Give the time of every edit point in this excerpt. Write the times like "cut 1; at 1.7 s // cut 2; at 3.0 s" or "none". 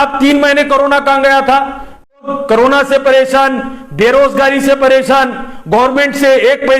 cut 1; at 2.2 s